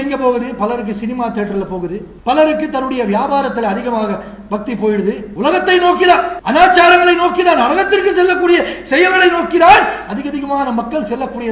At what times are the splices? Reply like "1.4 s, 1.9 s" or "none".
2.1 s, 5.3 s, 6.4 s